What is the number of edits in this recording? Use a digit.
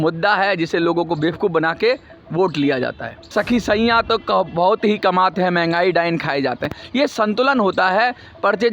1